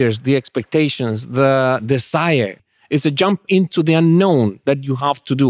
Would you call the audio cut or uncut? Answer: cut